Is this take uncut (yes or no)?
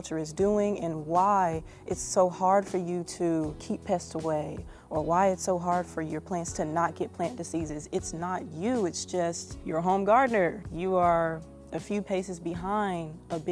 no